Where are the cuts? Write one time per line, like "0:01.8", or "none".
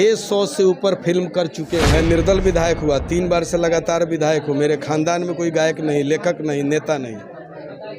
0:01.9